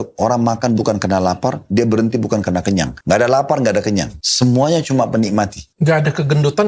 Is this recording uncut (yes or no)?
no